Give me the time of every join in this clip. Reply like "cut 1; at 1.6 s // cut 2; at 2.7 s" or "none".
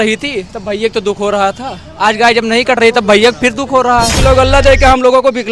cut 1; at 4.2 s